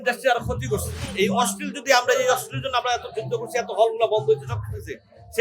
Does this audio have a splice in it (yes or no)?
yes